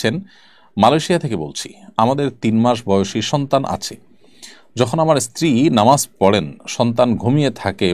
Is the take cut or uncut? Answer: uncut